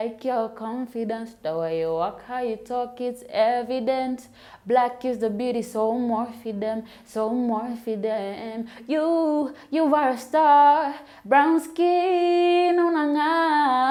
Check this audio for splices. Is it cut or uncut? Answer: uncut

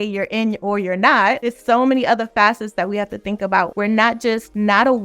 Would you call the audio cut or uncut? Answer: cut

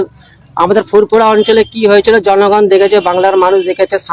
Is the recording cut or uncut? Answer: uncut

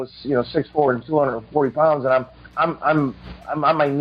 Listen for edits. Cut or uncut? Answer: cut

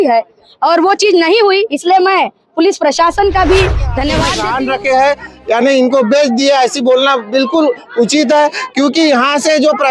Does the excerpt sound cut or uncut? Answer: cut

